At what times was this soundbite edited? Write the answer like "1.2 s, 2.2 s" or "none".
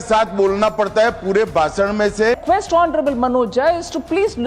2.4 s